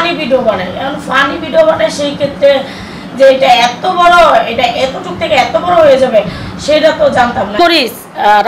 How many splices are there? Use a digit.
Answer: 1